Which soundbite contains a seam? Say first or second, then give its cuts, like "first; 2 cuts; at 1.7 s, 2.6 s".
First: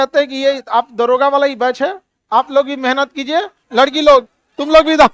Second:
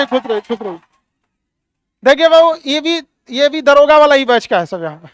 first; 1 cut; at 3.6 s